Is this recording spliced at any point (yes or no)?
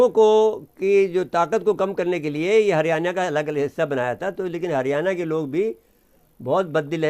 no